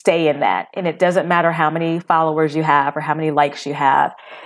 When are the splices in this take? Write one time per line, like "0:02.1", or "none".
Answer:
none